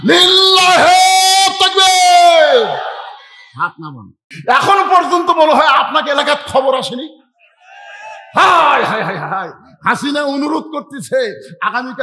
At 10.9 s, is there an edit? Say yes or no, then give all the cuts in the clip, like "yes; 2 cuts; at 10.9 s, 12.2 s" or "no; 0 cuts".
no; 1 cut; at 4.3 s